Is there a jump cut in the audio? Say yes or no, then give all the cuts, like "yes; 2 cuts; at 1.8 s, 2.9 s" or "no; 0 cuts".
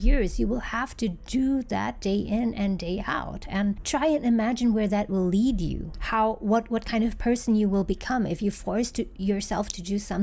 no; 0 cuts